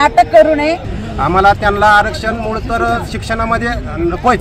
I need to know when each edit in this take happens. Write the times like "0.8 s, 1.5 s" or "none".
1.0 s